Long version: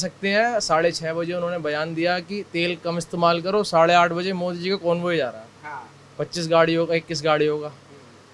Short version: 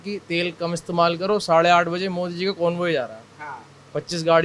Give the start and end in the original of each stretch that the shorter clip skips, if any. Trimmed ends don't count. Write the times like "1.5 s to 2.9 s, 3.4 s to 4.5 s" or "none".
none